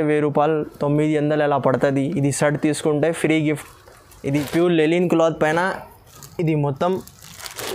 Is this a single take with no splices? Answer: no; 1 cut; at 4.5 s

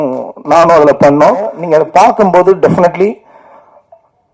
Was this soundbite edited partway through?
yes; 1 cut; at 1.6 s

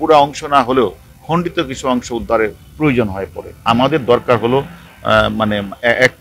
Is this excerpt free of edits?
no; 1 cut; at 3.7 s

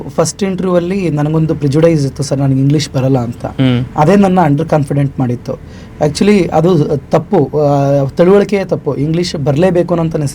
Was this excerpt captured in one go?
yes; 0 cuts

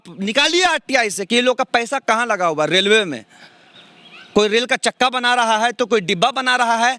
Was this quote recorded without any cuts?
yes; 0 cuts

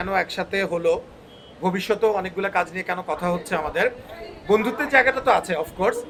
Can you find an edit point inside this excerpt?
no; 0 cuts

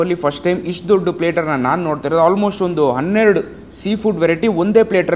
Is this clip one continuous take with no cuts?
yes; 0 cuts

